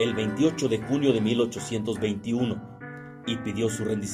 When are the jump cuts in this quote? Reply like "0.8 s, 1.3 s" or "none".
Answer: 2.0 s